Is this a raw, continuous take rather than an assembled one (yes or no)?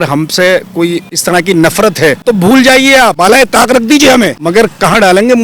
no